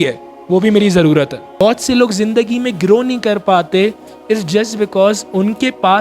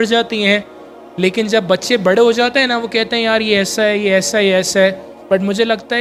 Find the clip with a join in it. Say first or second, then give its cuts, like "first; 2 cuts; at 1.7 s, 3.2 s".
first; 1 cut; at 1.4 s